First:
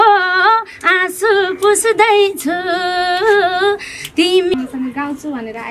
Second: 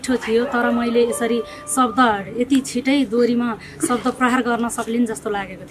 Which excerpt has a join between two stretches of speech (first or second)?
first